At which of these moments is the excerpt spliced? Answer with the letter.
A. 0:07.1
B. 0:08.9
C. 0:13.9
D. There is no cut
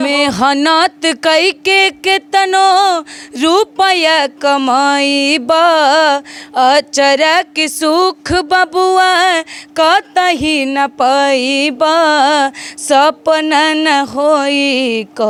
D